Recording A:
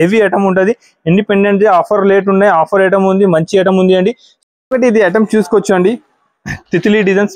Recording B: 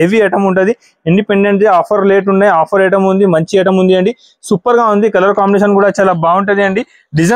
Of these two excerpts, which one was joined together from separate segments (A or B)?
A